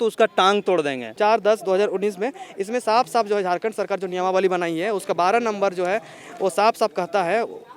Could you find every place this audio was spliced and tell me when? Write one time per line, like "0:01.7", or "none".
0:01.0